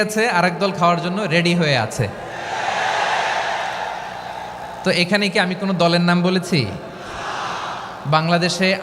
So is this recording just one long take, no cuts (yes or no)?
yes